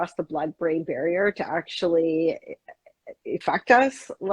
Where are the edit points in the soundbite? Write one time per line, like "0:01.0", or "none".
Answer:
0:03.4